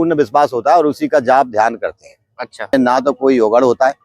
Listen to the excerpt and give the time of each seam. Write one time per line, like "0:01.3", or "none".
0:02.7